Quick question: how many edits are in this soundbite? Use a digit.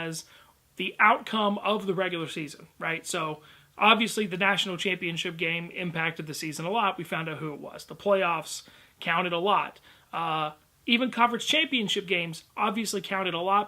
1